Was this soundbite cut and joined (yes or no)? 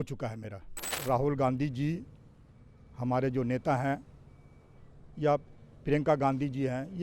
yes